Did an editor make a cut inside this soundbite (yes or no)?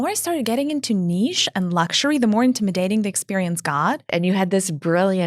yes